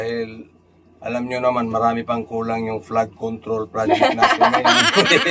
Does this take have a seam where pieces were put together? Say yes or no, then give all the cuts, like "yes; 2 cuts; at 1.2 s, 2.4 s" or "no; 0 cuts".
no; 0 cuts